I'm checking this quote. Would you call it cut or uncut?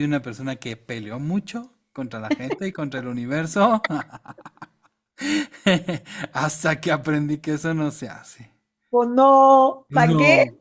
uncut